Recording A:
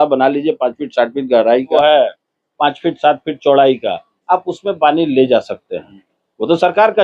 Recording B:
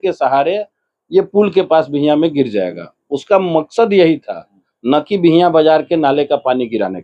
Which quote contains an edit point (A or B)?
A